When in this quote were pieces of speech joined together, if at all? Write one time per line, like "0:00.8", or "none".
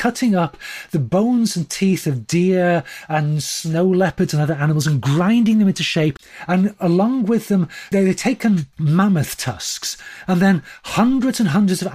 0:06.2
0:07.9
0:08.7